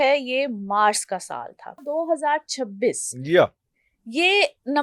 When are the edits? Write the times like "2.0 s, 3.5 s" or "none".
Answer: 1.8 s